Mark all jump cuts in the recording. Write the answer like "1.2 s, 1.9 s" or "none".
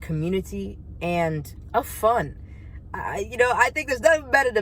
1.5 s